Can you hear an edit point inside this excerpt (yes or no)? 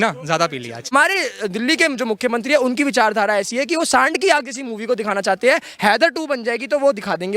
yes